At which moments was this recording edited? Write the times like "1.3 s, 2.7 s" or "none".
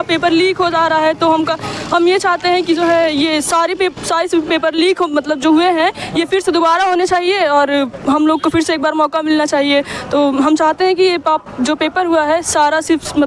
none